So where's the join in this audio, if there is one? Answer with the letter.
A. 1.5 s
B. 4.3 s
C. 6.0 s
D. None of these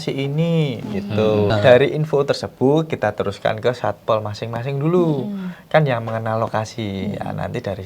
A